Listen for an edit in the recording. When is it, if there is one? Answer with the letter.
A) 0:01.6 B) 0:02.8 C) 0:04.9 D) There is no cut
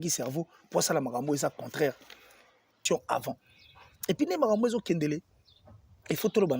B